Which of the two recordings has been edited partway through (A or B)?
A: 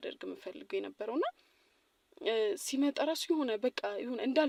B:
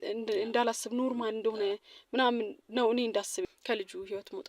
B